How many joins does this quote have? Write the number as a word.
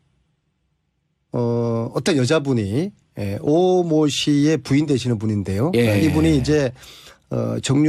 one